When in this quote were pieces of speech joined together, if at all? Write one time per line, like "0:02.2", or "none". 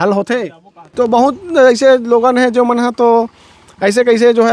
0:00.9